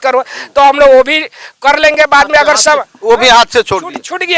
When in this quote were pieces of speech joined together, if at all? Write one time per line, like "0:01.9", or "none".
none